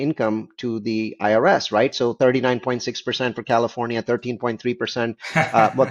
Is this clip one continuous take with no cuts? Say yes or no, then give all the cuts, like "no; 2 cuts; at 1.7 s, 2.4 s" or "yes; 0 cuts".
yes; 0 cuts